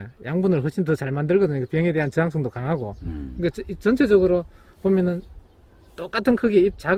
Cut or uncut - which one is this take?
uncut